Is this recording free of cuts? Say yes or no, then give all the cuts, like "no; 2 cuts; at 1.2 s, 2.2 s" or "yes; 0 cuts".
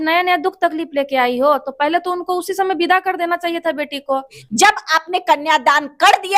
no; 1 cut; at 4.4 s